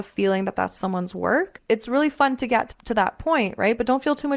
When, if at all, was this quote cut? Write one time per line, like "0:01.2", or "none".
0:01.6
0:02.7